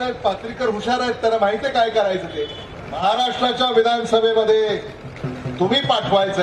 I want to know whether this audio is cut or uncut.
cut